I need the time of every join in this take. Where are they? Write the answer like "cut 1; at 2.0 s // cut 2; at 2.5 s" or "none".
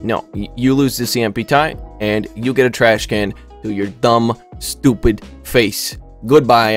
none